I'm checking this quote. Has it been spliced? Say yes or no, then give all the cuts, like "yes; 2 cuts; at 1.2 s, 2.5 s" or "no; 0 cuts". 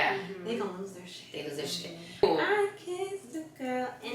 yes; 1 cut; at 2.2 s